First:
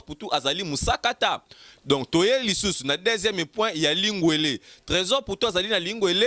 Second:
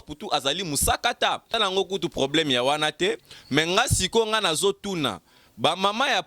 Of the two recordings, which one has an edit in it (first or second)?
second